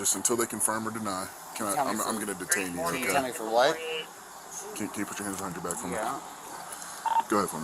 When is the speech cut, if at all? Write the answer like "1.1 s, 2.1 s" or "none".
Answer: none